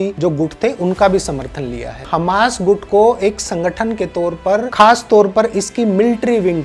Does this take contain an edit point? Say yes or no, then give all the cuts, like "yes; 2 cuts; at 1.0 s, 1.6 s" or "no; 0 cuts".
yes; 1 cut; at 2.0 s